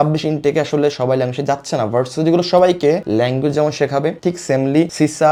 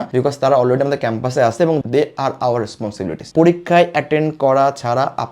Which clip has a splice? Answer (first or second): second